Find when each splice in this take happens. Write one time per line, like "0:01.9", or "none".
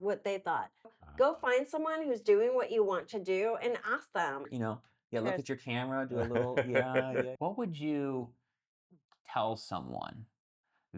0:01.0
0:04.5
0:07.3